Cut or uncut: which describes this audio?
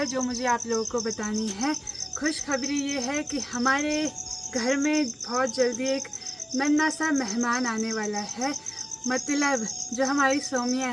uncut